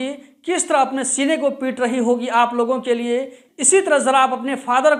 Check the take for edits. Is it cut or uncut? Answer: uncut